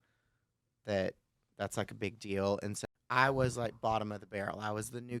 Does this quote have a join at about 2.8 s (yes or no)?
yes